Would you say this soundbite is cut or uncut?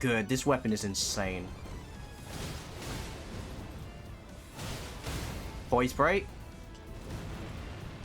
cut